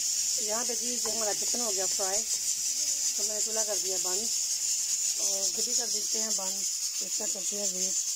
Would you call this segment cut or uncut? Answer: uncut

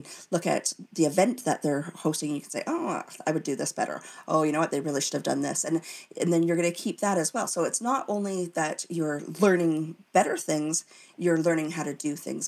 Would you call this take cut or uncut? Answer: uncut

